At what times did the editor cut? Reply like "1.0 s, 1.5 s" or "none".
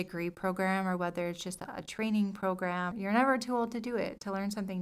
2.9 s